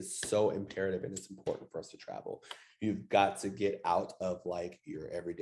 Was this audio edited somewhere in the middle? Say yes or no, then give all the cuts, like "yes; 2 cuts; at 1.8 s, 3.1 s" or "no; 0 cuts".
no; 0 cuts